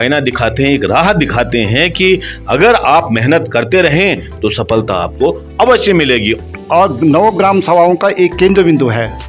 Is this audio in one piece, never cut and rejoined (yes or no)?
no